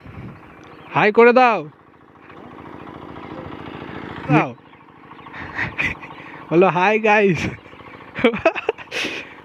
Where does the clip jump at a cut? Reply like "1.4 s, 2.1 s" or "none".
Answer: 4.4 s